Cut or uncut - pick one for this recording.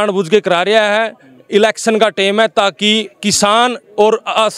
uncut